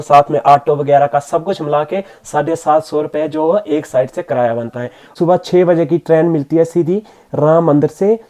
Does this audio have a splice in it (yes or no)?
yes